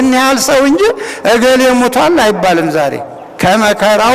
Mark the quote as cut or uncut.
uncut